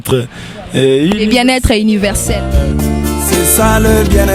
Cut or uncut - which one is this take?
uncut